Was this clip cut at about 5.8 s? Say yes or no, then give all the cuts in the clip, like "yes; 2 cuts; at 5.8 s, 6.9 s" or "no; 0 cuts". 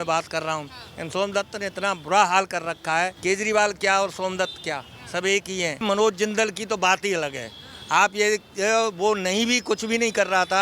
yes; 2 cuts; at 3.2 s, 5.8 s